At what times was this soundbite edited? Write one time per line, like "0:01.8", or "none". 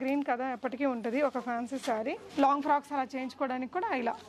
0:02.2